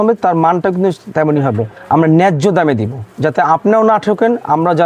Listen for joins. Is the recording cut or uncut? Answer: uncut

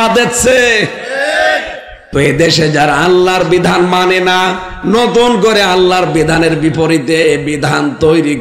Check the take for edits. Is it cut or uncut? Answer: cut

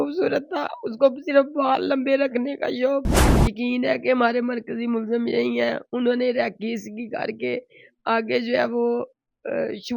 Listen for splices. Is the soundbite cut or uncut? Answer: cut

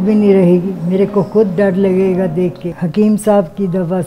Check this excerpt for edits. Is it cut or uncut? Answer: cut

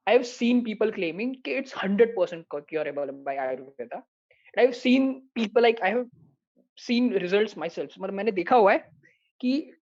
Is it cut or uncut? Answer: uncut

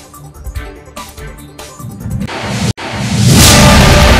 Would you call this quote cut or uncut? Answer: uncut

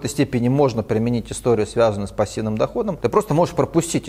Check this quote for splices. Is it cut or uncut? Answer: cut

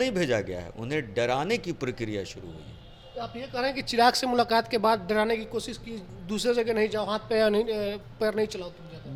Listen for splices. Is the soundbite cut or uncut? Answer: uncut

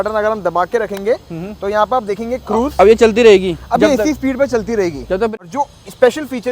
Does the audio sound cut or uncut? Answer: cut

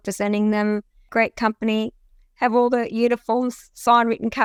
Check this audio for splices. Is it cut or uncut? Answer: uncut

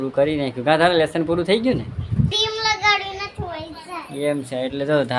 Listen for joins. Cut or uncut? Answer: cut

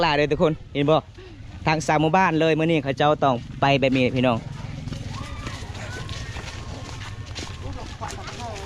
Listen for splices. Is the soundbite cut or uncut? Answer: uncut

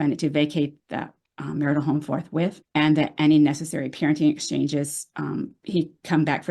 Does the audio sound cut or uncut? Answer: cut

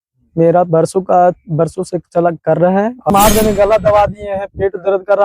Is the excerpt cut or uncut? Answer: cut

